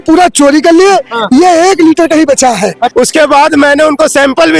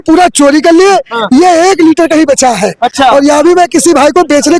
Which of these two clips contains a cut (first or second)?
first